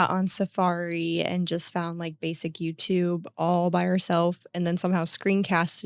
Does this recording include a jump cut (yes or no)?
no